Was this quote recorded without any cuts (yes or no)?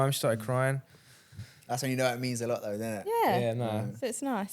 yes